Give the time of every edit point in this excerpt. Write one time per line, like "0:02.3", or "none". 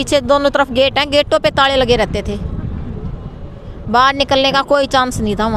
none